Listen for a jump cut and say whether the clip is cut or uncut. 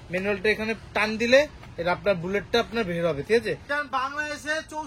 cut